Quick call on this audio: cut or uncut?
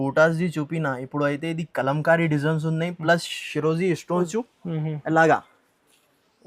cut